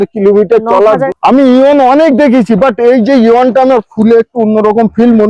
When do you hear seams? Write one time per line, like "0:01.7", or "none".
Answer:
0:01.1